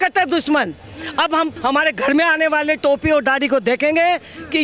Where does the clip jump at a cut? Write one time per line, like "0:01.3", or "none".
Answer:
0:01.5

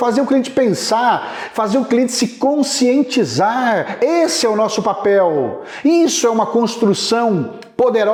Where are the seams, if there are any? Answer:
none

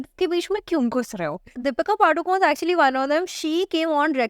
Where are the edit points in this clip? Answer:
0:01.6

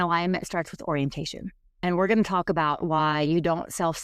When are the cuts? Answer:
0:01.7

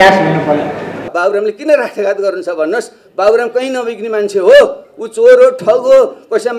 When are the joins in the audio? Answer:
0:01.0

